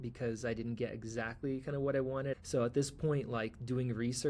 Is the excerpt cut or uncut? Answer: cut